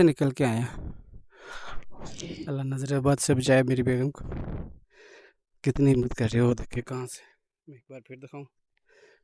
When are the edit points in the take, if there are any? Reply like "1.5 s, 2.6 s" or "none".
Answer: 2.4 s